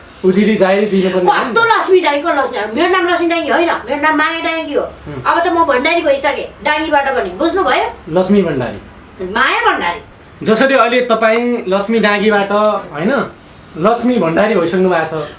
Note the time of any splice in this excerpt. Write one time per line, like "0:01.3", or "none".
none